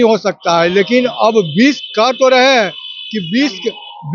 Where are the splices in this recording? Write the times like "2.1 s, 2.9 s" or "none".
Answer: none

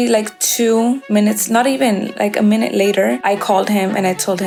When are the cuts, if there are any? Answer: none

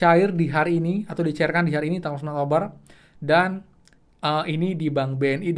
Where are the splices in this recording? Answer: none

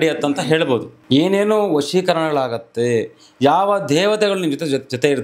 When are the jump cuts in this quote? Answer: 0.9 s

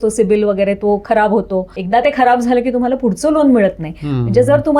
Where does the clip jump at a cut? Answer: 1.7 s

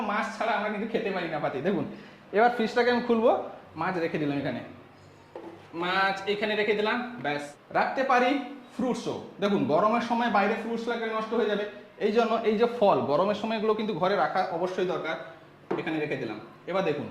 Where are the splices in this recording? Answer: 7.5 s

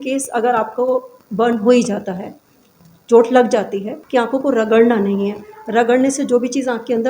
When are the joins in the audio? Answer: 4.0 s

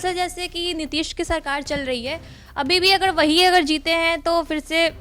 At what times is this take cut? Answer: none

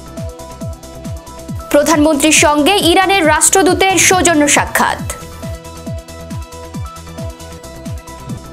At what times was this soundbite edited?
1.6 s, 5.0 s

